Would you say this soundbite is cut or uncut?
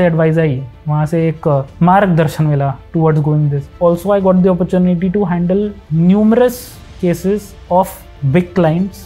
cut